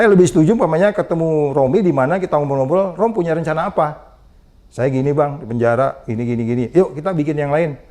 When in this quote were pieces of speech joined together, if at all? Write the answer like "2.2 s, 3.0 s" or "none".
none